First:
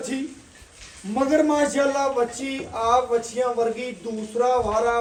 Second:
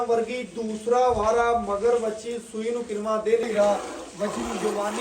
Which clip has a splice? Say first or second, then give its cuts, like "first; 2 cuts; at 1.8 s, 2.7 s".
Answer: second; 1 cut; at 3.4 s